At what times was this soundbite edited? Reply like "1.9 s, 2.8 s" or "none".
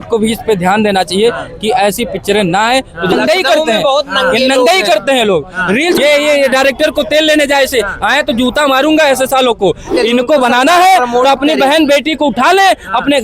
3.1 s, 6.0 s, 9.9 s